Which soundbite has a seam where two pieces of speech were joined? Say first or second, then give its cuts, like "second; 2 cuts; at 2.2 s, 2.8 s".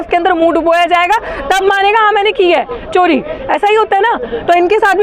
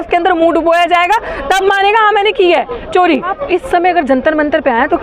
second; 1 cut; at 3.3 s